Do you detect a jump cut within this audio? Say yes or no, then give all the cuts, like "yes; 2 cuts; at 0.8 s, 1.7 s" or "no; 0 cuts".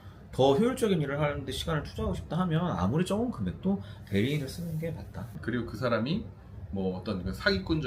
yes; 1 cut; at 5.4 s